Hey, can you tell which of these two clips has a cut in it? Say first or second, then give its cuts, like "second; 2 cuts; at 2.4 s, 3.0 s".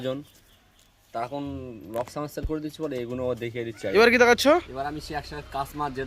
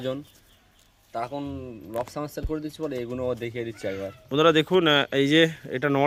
first; 1 cut; at 3.8 s